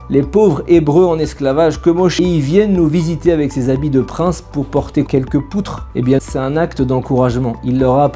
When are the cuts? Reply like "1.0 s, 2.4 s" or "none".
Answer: 2.1 s, 5.1 s, 6.2 s